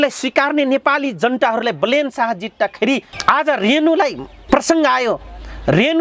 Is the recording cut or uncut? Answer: cut